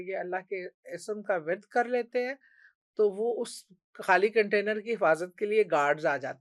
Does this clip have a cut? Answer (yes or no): no